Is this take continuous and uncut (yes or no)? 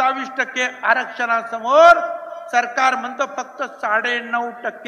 yes